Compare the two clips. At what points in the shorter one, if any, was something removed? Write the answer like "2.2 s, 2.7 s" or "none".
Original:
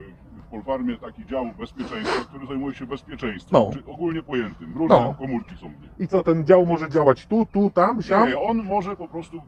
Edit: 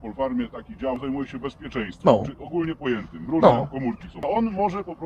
1.0 s, 4.2 s